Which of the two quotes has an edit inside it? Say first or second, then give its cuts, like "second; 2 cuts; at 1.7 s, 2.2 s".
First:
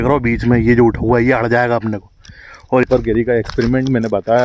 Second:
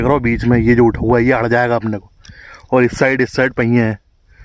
first; 1 cut; at 2.8 s